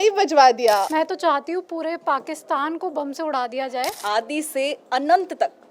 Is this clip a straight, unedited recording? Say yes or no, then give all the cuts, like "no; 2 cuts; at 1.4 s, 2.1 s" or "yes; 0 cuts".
no; 2 cuts; at 0.9 s, 4.0 s